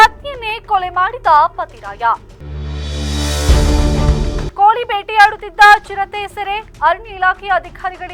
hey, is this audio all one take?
yes; 0 cuts

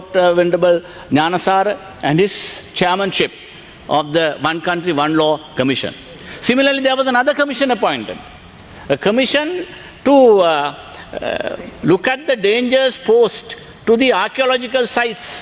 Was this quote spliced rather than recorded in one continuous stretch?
no; 0 cuts

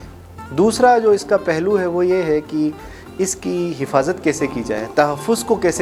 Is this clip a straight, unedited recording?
yes; 0 cuts

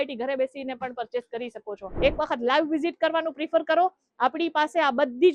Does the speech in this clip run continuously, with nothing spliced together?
no; 1 cut; at 1.9 s

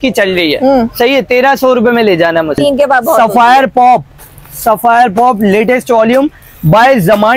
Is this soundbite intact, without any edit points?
no; 1 cut; at 2.6 s

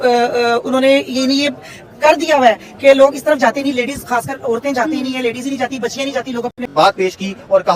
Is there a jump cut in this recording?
yes; 1 cut; at 6.7 s

